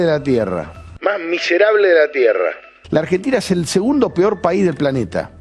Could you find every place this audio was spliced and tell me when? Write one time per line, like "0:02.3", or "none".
none